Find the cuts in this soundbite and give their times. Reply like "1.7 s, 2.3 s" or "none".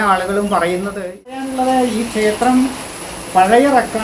1.4 s

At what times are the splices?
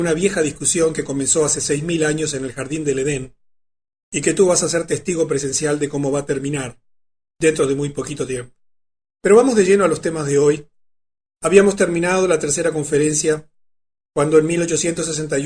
9.7 s

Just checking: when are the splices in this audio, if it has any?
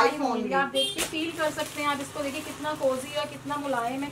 none

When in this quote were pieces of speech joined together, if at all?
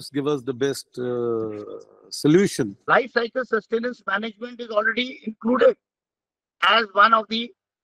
2.8 s

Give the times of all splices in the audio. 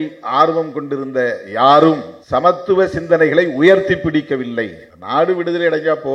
2.2 s

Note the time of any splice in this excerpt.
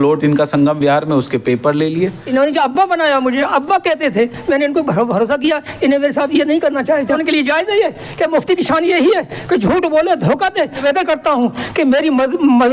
2.2 s, 7.2 s, 10.8 s

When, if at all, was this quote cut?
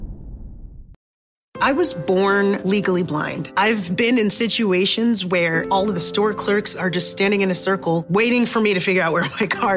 0.9 s

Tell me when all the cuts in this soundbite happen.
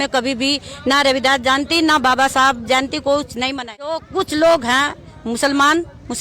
4.0 s

